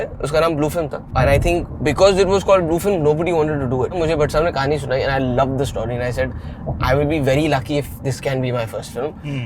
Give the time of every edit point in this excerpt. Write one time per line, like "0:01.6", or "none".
0:01.1
0:04.0